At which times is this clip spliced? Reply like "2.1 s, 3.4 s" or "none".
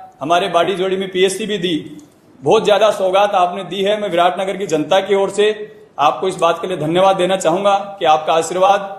none